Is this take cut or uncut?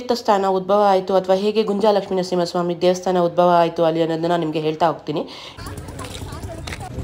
cut